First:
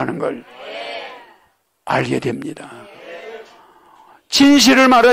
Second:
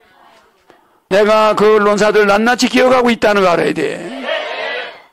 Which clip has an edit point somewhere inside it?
second; 1 cut; at 1.0 s

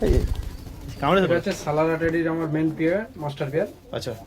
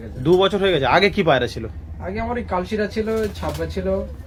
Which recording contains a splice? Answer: first; 1 cut; at 1.2 s

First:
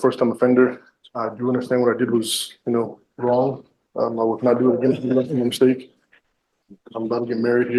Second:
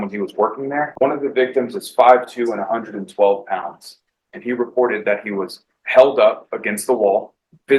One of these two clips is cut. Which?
second; 1 cut; at 0.9 s

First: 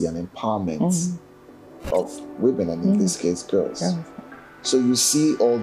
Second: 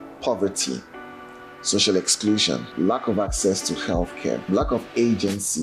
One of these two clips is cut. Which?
second; 2 cuts; at 2.7 s, 4.4 s

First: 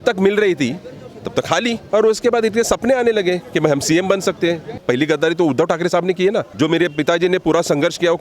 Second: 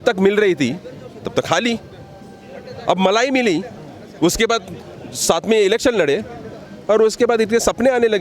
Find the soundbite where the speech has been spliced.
first; 3 cuts; at 1.8 s, 4.7 s, 6.5 s

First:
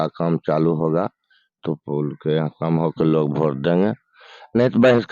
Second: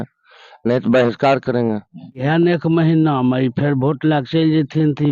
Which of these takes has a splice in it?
second; 1 cut; at 2.2 s

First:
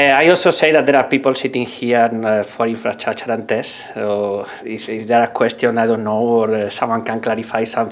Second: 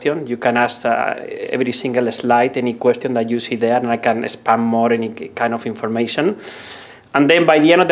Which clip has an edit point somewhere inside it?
second; 1 cut; at 5.2 s

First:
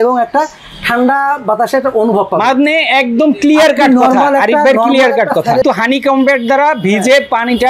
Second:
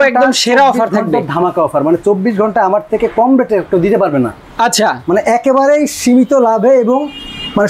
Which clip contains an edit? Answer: first; 1 cut; at 5.6 s

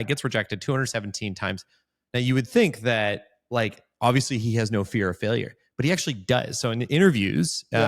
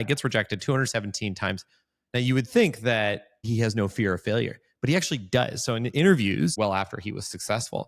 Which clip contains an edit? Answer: second; 2 cuts; at 3.5 s, 6.5 s

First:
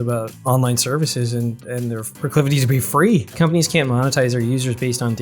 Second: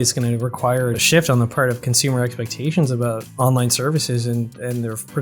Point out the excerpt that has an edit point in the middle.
first; 1 cut; at 3.3 s

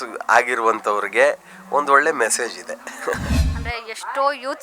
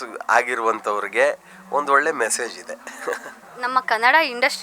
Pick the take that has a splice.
first; 1 cut; at 3.4 s

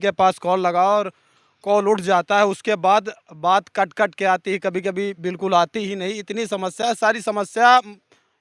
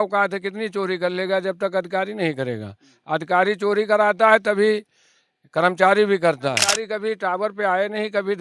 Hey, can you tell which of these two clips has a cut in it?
second; 1 cut; at 6.7 s

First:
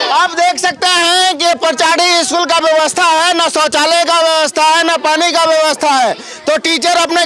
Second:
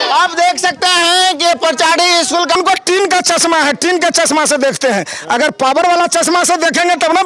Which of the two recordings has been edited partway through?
second; 1 cut; at 2.6 s

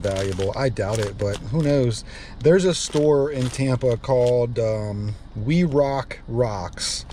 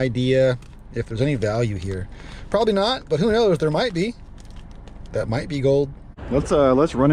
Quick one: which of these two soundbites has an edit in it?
second; 1 cut; at 6.1 s

